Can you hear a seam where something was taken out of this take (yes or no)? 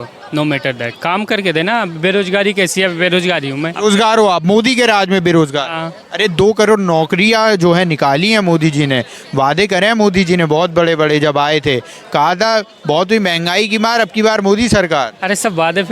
yes